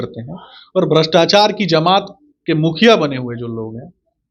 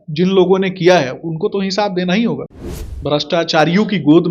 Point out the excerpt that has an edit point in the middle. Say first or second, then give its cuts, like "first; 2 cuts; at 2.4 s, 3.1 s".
second; 1 cut; at 2.5 s